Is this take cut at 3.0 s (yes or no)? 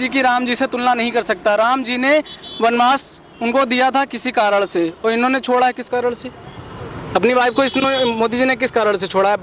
no